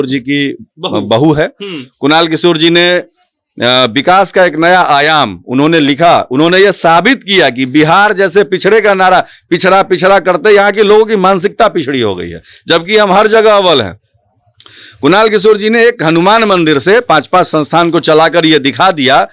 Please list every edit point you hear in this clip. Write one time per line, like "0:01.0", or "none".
none